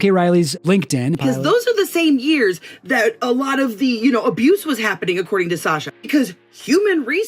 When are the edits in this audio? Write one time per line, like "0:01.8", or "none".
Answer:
0:01.2
0:03.3